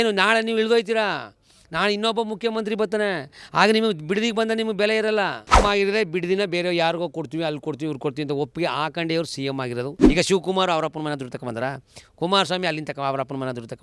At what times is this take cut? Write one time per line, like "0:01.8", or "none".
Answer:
0:05.6
0:10.0